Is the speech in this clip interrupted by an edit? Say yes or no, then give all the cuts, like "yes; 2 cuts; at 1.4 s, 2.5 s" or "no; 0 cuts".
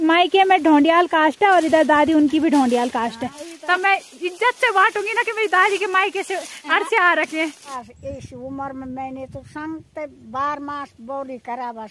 yes; 2 cuts; at 3.5 s, 7.7 s